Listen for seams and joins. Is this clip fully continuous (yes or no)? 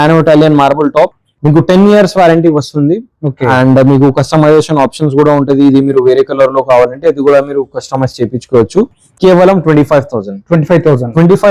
yes